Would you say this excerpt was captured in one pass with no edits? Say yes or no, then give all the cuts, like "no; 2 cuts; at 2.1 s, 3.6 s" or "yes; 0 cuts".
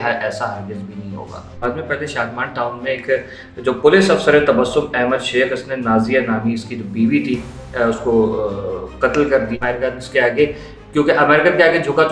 no; 2 cuts; at 1.6 s, 9.6 s